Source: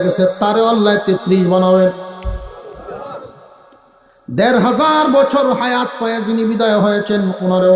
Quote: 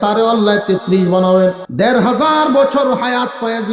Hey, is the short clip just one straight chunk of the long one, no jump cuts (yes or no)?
no